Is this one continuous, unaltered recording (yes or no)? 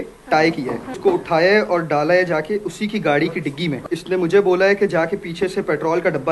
no